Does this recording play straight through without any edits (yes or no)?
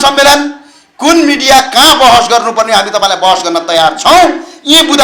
yes